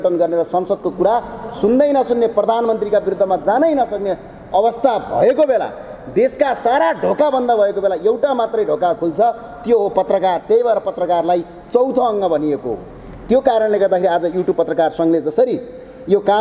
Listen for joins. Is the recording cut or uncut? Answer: uncut